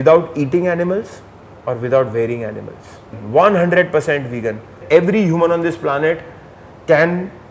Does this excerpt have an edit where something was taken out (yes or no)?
yes